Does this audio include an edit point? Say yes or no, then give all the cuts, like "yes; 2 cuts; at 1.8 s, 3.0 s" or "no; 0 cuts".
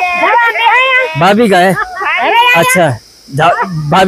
no; 0 cuts